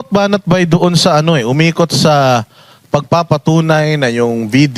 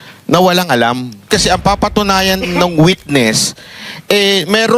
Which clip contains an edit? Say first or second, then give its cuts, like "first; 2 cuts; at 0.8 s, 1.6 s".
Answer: second; 1 cut; at 1.3 s